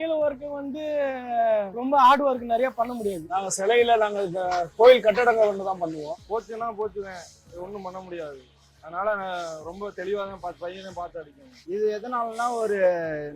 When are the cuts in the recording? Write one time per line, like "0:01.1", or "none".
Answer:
0:03.2
0:06.1